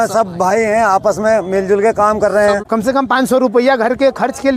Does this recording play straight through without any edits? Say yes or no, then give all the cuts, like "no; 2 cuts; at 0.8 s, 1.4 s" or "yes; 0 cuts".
no; 1 cut; at 2.6 s